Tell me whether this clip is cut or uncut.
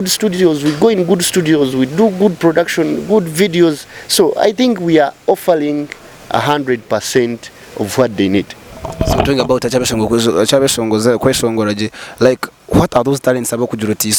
uncut